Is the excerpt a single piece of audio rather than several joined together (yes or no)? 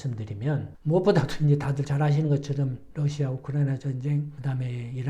no